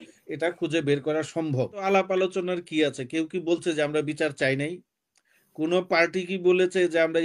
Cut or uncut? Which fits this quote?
cut